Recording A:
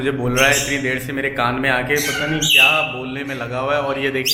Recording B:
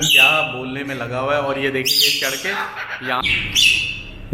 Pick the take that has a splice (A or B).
B